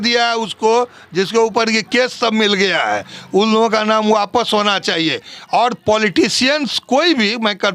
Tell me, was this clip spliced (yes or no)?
no